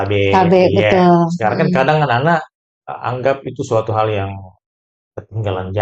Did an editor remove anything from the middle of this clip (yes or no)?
no